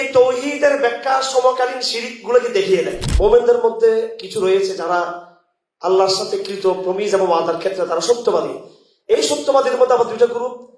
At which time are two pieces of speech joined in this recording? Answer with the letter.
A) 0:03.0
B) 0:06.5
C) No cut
A